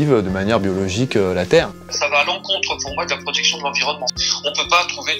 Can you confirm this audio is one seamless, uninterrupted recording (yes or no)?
no